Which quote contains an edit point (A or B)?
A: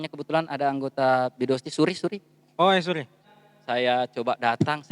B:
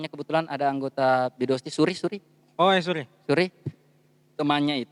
A